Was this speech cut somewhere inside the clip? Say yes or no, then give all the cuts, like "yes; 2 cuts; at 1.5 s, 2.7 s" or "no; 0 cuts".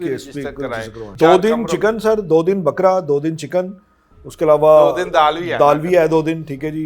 yes; 1 cut; at 1.0 s